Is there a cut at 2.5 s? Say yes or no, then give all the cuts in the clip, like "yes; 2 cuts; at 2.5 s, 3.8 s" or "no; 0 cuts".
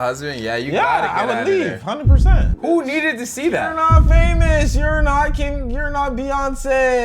yes; 1 cut; at 2.5 s